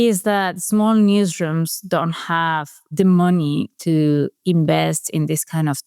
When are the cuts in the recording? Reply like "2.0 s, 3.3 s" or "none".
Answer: 2.8 s